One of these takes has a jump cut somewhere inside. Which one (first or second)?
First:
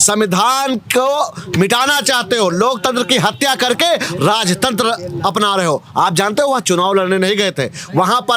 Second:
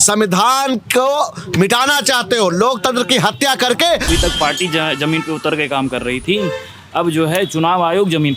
second